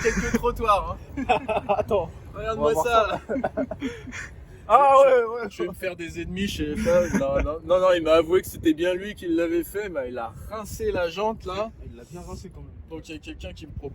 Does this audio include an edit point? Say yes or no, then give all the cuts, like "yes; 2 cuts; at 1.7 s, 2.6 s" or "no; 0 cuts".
no; 0 cuts